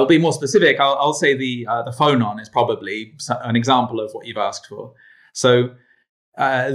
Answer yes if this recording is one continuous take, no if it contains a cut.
yes